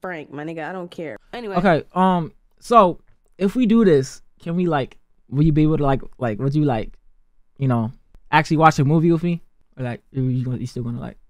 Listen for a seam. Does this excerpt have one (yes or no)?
yes